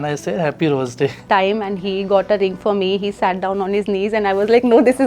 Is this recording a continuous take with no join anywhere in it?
no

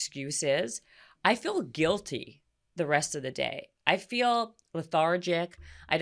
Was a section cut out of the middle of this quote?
no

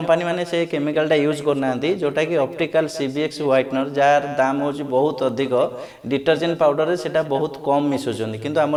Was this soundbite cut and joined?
no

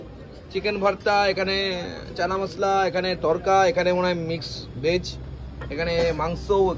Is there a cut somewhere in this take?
no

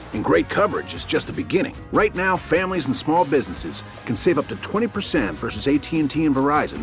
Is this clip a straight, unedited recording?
yes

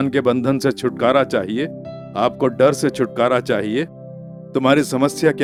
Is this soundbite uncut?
yes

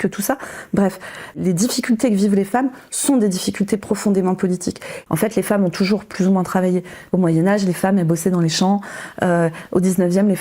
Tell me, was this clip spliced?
yes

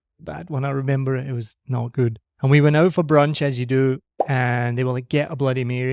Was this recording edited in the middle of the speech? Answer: yes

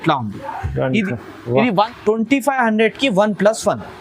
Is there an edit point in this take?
yes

